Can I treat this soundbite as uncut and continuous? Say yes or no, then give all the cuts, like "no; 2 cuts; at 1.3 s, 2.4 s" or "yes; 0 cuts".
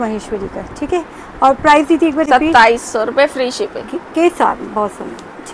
yes; 0 cuts